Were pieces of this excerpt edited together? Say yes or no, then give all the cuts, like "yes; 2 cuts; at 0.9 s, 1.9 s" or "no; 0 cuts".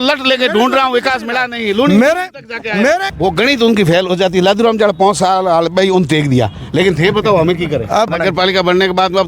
yes; 2 cuts; at 3.1 s, 8.1 s